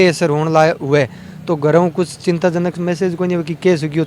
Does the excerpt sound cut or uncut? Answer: uncut